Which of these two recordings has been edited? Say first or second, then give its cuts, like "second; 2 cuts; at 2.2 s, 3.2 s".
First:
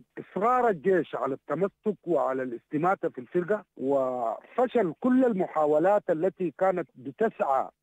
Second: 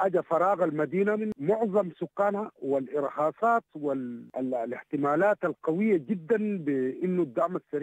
second; 1 cut; at 1.3 s